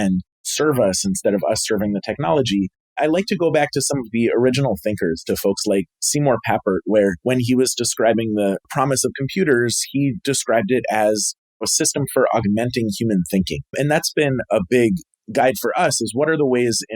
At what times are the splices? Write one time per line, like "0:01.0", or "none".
0:15.1